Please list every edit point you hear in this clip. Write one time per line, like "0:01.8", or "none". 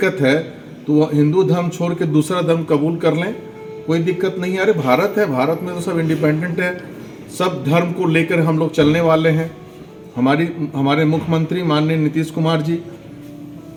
none